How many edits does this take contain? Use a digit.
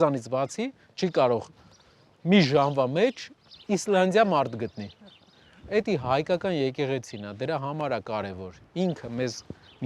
0